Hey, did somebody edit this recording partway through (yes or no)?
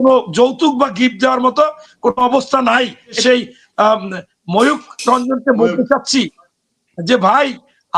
yes